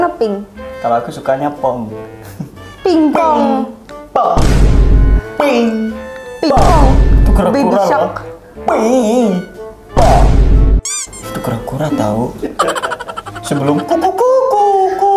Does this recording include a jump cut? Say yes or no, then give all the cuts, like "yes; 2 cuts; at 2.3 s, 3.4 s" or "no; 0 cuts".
no; 0 cuts